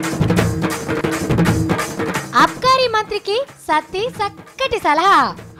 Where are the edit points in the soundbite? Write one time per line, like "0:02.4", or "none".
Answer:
0:01.0